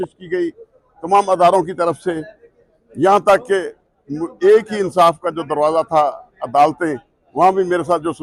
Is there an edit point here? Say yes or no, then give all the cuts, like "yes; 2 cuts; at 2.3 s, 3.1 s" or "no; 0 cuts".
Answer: no; 0 cuts